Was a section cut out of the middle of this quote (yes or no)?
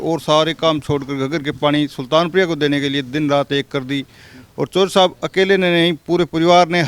no